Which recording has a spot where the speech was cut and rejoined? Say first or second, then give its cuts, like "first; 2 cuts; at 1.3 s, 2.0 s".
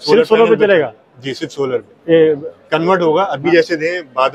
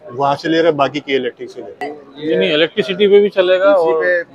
second; 1 cut; at 2.0 s